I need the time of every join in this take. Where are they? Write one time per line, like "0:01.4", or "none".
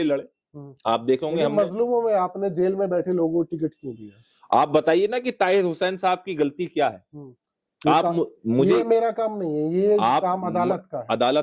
none

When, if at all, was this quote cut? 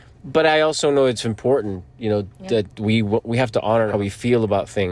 0:03.9

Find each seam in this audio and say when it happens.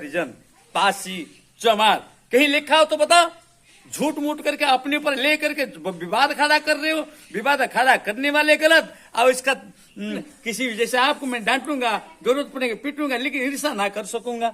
0:10.3

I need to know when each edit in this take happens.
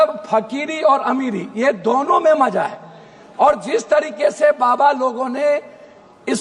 none

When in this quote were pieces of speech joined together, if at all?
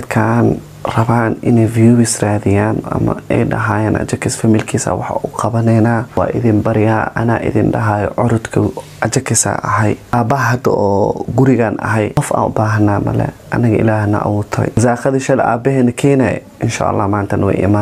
0:06.1
0:10.1
0:12.2
0:14.8

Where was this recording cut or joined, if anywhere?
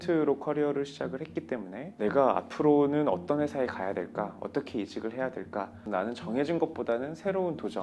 0:01.8
0:05.8

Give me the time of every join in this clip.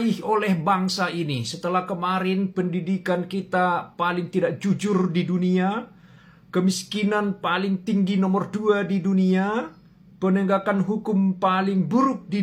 none

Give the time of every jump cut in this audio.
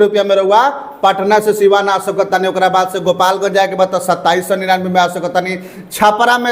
none

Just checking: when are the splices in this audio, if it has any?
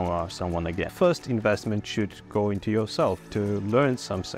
0:00.9
0:03.2

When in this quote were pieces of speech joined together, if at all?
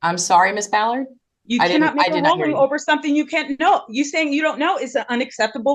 none

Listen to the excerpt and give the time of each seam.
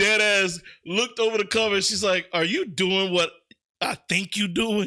none

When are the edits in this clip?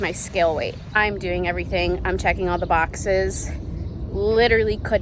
0:00.9

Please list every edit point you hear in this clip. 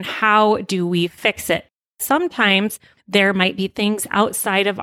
0:01.9
0:02.9

